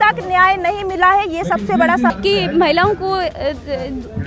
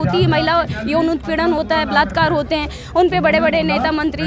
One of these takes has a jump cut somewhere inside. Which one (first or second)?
first